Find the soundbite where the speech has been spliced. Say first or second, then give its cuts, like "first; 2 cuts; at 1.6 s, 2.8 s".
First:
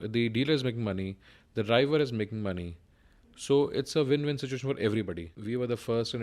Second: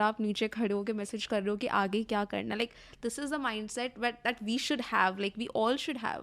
first; 1 cut; at 5.3 s